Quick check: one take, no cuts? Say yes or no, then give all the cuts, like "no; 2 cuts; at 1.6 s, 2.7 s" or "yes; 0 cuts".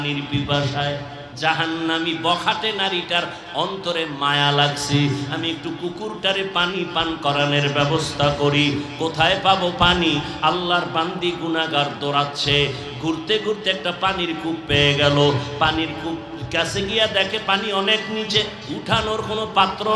no; 1 cut; at 1.2 s